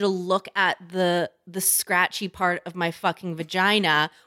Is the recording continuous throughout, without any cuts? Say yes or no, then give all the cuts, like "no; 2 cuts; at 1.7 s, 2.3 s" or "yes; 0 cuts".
yes; 0 cuts